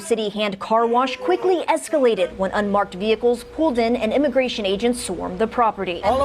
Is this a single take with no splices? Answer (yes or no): no